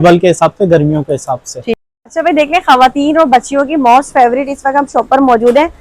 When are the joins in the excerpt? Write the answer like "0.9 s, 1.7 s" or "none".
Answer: 1.8 s